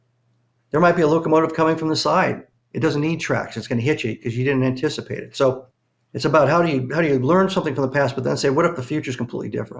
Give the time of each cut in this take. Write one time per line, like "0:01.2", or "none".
0:05.7